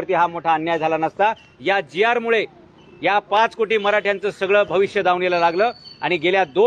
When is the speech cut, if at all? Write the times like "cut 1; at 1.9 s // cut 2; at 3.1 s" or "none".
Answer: none